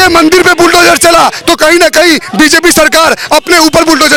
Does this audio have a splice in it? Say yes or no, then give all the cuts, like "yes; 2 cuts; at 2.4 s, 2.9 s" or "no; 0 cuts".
no; 0 cuts